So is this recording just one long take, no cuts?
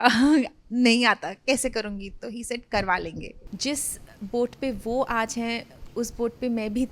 no; 1 cut; at 3.4 s

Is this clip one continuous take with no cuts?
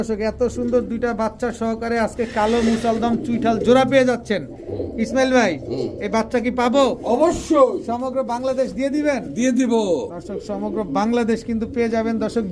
yes; 0 cuts

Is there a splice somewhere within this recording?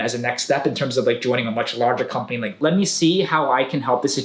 yes; 1 cut; at 2.5 s

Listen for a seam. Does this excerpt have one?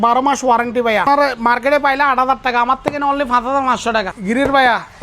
yes; 2 cuts; at 1.0 s, 4.1 s

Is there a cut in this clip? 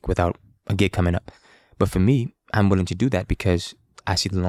no; 0 cuts

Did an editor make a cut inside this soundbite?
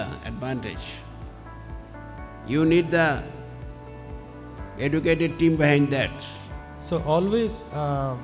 yes; 1 cut; at 6.8 s

